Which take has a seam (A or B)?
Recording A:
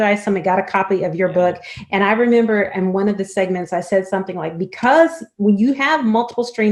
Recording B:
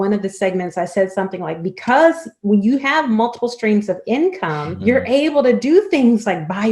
B